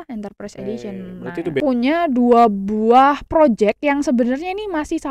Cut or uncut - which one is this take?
cut